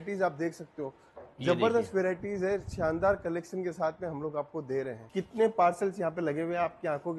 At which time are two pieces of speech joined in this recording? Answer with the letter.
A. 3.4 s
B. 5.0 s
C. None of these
B